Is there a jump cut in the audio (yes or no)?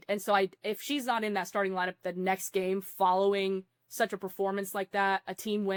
no